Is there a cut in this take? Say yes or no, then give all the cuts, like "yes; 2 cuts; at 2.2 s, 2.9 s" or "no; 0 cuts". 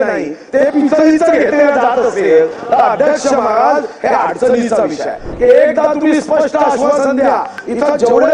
yes; 1 cut; at 5.2 s